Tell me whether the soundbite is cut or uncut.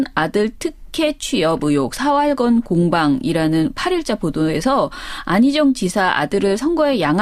uncut